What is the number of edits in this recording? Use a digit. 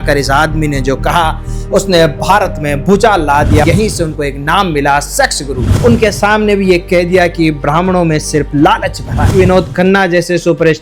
3